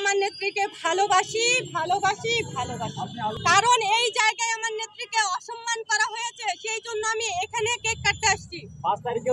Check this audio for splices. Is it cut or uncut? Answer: uncut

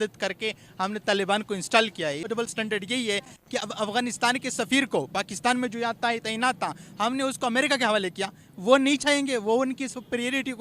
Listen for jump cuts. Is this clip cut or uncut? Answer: cut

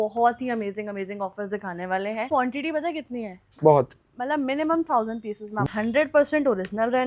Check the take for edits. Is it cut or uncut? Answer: cut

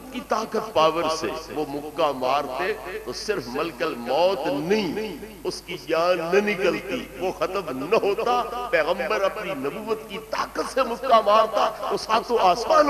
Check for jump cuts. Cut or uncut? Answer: uncut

